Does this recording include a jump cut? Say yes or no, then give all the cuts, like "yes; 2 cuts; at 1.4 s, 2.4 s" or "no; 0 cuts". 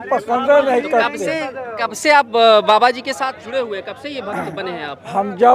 no; 0 cuts